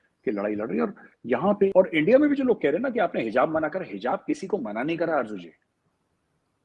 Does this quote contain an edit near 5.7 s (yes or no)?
no